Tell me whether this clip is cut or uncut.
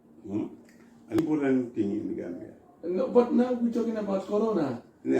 cut